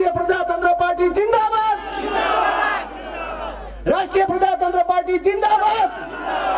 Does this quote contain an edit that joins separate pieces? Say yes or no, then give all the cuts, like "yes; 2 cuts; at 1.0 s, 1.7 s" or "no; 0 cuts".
no; 0 cuts